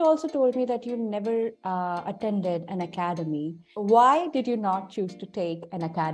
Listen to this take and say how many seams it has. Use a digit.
1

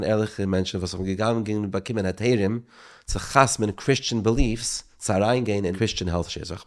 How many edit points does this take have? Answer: 1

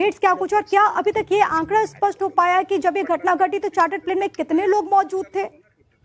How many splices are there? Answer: 1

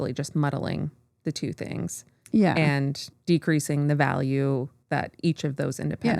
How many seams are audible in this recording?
2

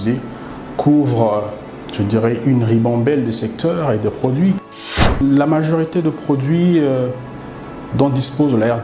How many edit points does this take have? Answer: 1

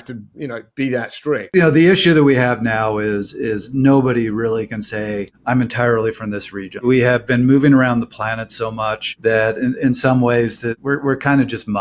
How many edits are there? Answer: 5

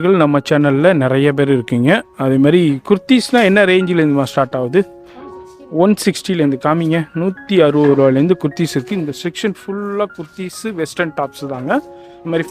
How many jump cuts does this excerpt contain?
0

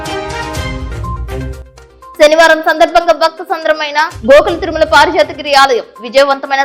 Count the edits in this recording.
1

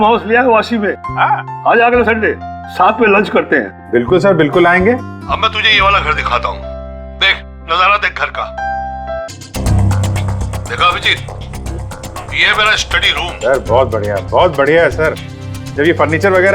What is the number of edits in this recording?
2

